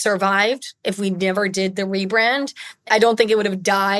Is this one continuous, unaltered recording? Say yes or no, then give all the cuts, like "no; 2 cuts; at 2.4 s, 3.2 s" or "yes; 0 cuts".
no; 1 cut; at 2.8 s